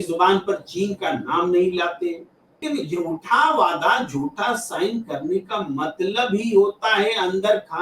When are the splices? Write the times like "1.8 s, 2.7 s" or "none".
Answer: 2.6 s

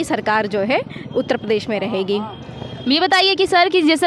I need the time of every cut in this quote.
none

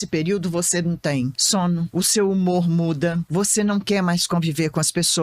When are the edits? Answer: 1.6 s, 3.2 s

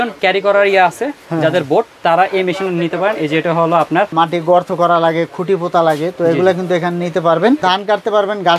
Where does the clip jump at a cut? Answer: 4.1 s, 7.6 s

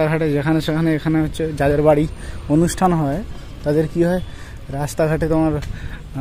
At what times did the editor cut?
none

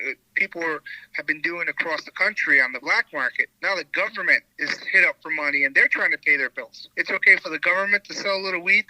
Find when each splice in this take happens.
3.4 s, 4.6 s, 6.8 s

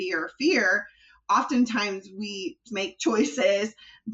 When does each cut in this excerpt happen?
2.7 s

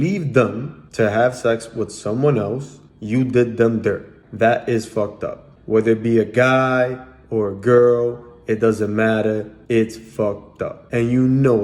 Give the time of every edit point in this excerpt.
10.7 s

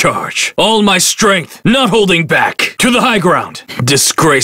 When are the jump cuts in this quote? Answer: 3.5 s

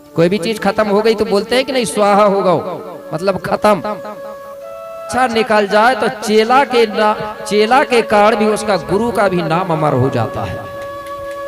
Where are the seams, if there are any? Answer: 5.1 s

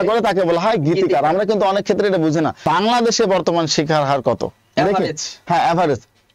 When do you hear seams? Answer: 2.6 s

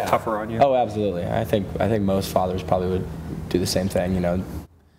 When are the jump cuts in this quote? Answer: none

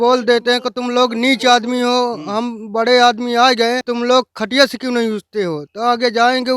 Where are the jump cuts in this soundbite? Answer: 3.8 s

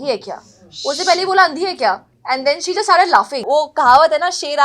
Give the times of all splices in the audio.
3.4 s

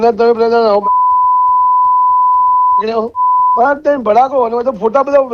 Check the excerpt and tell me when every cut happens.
3.1 s

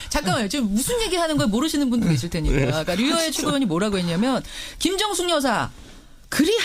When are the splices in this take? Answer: none

